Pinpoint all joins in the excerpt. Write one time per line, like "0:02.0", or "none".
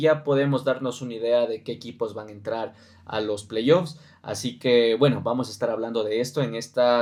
none